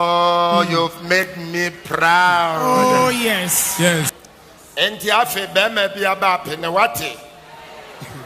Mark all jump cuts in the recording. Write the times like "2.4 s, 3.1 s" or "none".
4.2 s